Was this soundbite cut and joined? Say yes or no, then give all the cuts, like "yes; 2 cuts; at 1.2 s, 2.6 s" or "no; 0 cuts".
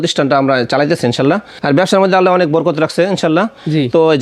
yes; 1 cut; at 1.6 s